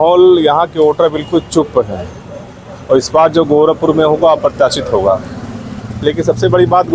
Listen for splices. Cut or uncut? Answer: uncut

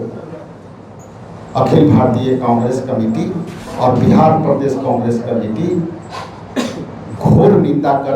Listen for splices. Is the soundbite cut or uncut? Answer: cut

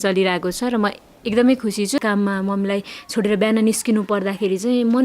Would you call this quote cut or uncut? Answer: cut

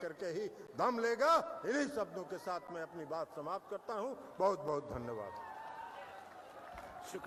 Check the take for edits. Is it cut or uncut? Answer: uncut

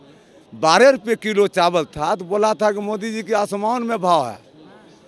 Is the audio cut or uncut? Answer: uncut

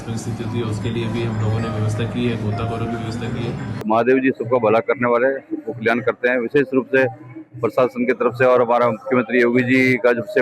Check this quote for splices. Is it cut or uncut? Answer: cut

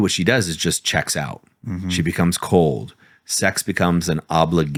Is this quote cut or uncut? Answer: uncut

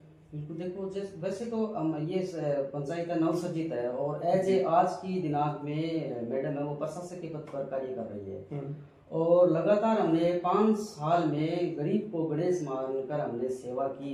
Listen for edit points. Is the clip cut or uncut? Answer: uncut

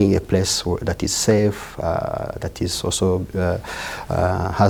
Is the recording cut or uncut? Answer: uncut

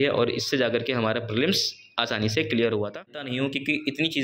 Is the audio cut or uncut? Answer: cut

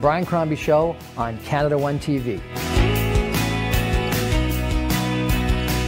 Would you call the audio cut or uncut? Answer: uncut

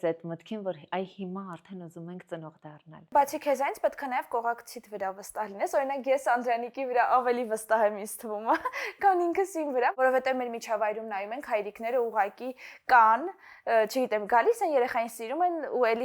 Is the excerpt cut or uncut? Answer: cut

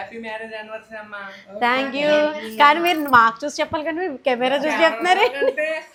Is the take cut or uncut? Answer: uncut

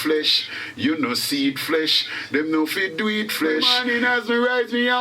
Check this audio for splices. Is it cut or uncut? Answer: cut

